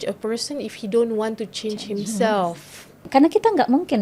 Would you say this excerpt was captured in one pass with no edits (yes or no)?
no